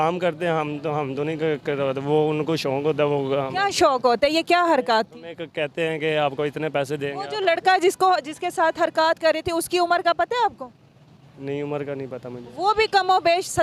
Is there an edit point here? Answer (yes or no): no